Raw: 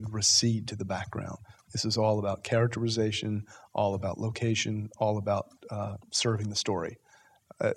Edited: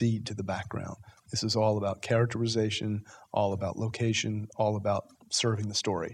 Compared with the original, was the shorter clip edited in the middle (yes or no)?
yes